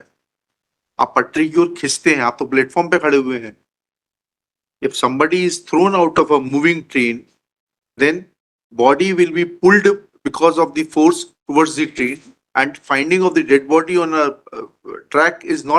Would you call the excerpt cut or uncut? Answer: uncut